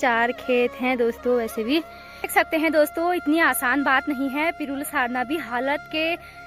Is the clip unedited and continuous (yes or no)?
no